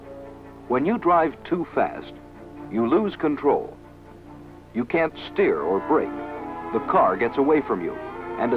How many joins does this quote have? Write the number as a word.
one